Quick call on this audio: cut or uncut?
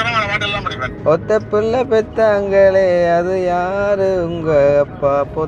uncut